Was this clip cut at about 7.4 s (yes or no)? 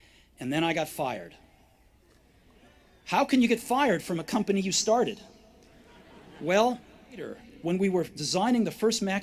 yes